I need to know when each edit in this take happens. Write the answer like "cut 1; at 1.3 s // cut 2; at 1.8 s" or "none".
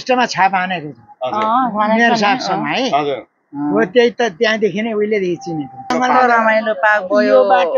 cut 1; at 5.9 s